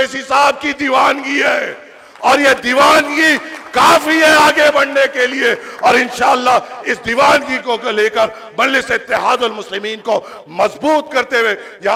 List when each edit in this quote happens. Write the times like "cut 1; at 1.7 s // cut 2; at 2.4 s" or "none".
none